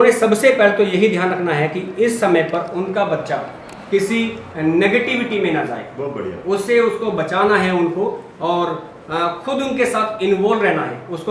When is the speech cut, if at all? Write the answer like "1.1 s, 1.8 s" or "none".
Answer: none